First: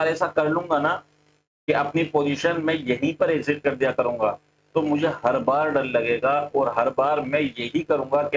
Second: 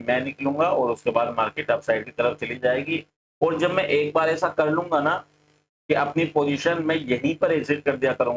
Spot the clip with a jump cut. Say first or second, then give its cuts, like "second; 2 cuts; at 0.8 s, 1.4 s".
second; 1 cut; at 3.0 s